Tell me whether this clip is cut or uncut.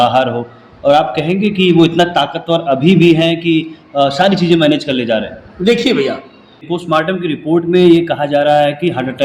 cut